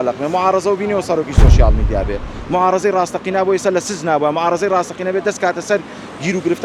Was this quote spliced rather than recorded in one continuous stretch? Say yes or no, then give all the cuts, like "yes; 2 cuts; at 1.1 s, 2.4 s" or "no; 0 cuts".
no; 0 cuts